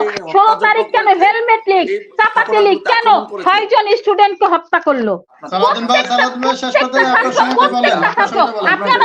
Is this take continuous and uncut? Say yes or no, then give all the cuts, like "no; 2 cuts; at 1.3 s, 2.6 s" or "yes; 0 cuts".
no; 1 cut; at 5.3 s